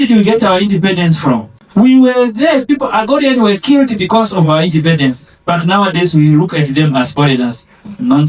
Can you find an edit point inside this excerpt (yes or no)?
yes